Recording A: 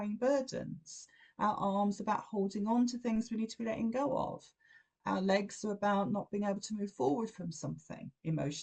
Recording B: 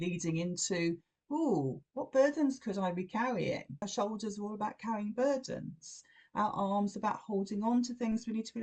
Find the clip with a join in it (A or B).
B